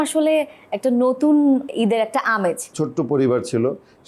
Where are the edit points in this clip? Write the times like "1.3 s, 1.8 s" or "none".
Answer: 1.7 s, 2.7 s